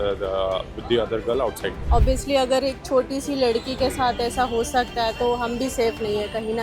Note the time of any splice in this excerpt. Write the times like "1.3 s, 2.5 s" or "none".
1.7 s